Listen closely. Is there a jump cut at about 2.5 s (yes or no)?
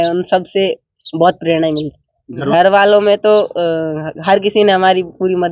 yes